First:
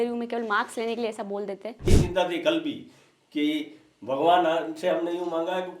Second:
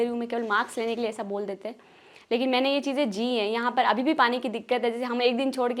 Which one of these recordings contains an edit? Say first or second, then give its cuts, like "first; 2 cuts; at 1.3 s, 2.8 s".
first; 1 cut; at 1.9 s